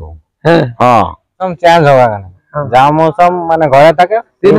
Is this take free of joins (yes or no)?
no